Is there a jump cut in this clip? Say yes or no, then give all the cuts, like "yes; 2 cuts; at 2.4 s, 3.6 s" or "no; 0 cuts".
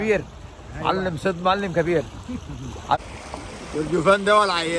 yes; 1 cut; at 3.0 s